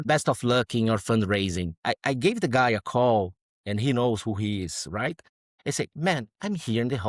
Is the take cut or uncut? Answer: uncut